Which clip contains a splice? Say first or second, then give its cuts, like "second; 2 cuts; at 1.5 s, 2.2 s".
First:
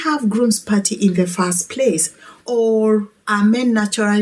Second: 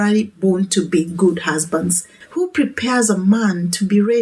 second; 1 cut; at 2.1 s